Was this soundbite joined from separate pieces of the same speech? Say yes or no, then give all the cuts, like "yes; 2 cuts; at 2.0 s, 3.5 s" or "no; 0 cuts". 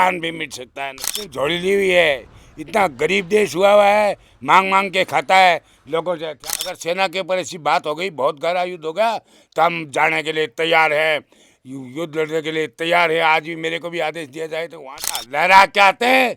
yes; 3 cuts; at 1.3 s, 6.3 s, 15.3 s